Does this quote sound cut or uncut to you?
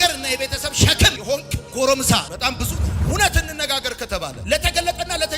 uncut